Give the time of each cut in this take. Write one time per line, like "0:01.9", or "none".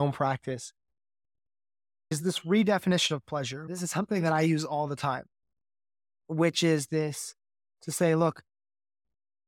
0:02.2
0:03.6

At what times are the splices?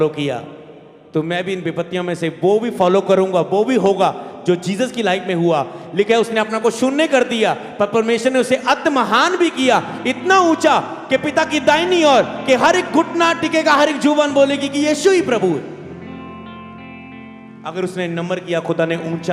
none

